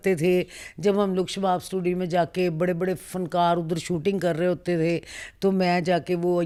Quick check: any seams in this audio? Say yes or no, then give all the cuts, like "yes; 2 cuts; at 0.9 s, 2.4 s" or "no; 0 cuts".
no; 0 cuts